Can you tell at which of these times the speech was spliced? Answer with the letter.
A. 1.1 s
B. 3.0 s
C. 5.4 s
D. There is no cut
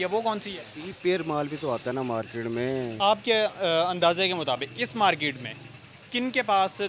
B